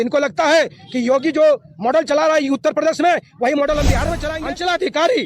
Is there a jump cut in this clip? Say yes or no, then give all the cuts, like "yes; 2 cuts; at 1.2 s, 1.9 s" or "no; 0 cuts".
yes; 1 cut; at 4.0 s